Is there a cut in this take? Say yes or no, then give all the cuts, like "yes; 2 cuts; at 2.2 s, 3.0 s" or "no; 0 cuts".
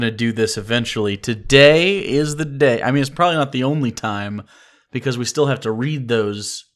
no; 0 cuts